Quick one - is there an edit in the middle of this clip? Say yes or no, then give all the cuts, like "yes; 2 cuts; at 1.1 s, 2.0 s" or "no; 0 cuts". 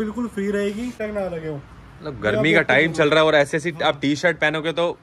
yes; 1 cut; at 1.0 s